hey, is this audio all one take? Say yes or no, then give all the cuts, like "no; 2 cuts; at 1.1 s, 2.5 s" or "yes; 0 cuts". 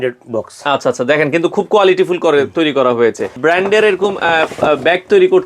no; 1 cut; at 3.4 s